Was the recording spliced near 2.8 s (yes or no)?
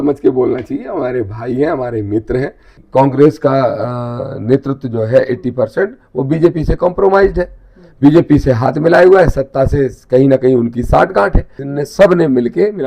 yes